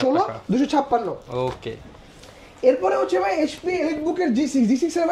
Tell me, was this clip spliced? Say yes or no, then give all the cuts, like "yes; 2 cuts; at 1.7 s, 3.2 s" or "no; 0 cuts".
no; 0 cuts